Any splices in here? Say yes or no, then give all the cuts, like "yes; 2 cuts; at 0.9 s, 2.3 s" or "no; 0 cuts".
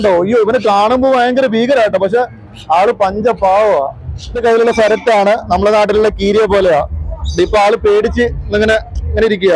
yes; 1 cut; at 4.3 s